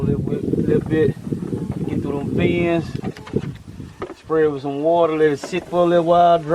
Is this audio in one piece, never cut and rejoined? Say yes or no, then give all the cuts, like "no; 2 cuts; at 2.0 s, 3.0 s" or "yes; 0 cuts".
yes; 0 cuts